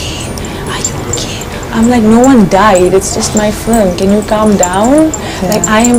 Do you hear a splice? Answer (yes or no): no